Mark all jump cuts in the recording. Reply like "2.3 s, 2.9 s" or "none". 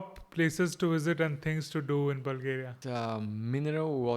2.8 s